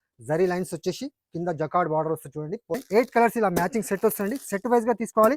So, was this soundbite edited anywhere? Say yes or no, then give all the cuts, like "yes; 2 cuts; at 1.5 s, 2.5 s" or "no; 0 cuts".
yes; 1 cut; at 2.8 s